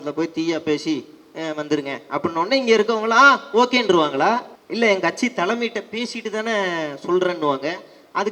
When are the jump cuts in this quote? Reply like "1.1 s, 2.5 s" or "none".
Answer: 4.6 s